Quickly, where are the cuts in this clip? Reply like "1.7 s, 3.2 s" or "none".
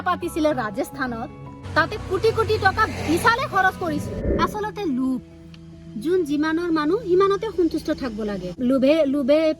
4.2 s, 8.5 s